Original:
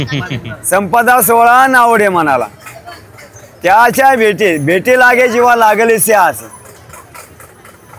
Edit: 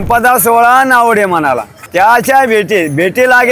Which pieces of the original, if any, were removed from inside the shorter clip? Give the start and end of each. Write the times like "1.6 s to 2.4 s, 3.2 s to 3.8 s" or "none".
2.6 s to 3.5 s